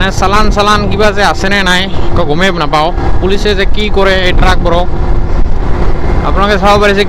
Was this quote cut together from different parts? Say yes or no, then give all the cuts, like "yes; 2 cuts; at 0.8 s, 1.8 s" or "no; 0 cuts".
no; 0 cuts